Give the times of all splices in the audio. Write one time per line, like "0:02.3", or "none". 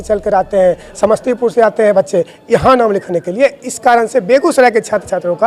none